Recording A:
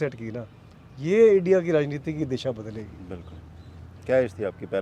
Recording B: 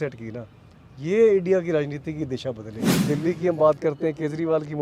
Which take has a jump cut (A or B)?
B